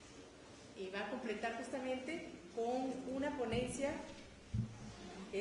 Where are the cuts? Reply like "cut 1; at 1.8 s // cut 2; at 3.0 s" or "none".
cut 1; at 1.6 s